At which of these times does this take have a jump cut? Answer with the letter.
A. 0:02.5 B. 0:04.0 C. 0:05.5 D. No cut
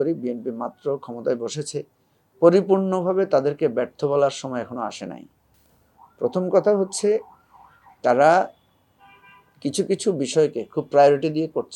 D